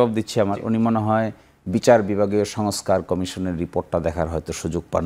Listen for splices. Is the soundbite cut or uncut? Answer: uncut